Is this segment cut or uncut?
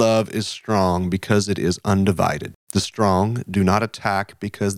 cut